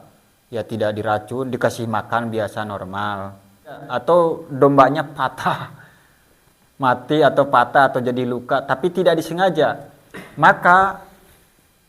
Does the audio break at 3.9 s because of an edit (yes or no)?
yes